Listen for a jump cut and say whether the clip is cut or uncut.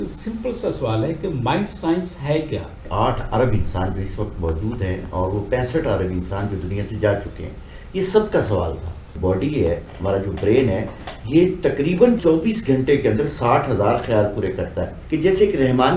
cut